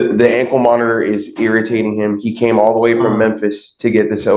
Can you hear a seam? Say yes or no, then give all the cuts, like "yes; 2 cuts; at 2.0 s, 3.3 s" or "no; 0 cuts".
no; 0 cuts